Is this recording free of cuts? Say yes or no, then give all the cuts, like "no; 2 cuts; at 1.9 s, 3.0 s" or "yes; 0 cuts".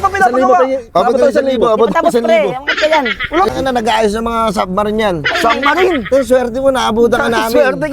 no; 1 cut; at 3.5 s